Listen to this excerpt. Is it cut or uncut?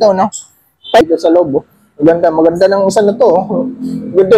cut